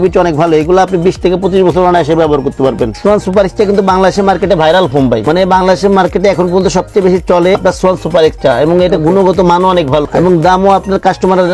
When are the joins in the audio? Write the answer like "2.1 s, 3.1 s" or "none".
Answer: 2.9 s, 5.2 s, 7.6 s, 10.1 s